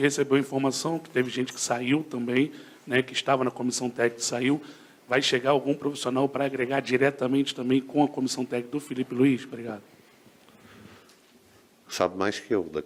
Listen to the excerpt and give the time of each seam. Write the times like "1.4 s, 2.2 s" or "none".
none